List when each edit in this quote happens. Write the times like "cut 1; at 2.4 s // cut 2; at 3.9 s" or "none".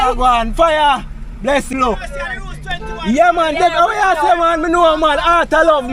cut 1; at 1.7 s